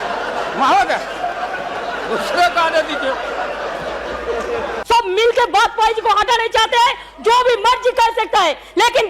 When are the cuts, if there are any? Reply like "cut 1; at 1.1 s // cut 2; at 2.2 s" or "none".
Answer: cut 1; at 4.7 s